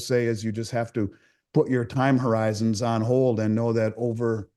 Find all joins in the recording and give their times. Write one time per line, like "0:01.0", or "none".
none